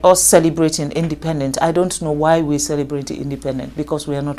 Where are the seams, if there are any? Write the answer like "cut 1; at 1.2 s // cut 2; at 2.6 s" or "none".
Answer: none